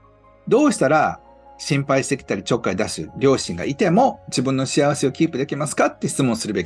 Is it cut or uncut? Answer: uncut